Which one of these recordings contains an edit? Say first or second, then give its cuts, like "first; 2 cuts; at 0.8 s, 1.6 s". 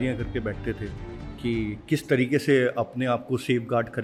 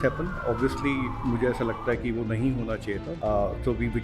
second; 2 cuts; at 1.1 s, 3.1 s